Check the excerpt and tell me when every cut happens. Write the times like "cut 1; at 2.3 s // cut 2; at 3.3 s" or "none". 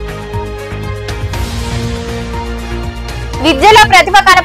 cut 1; at 1.2 s